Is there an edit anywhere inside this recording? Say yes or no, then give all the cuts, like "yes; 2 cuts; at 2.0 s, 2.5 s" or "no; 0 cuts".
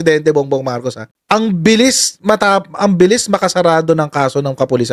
no; 0 cuts